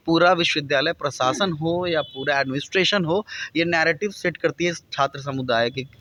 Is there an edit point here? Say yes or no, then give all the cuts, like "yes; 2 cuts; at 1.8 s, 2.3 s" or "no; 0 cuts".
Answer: no; 0 cuts